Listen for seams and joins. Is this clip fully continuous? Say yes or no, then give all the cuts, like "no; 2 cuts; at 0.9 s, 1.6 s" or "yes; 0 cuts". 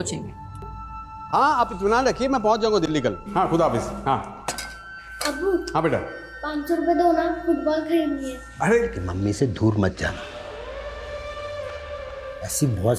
no; 1 cut; at 9.1 s